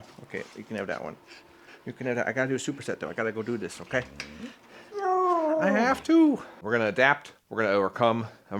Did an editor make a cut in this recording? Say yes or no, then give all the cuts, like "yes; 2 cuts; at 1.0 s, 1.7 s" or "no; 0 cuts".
yes; 1 cut; at 6.6 s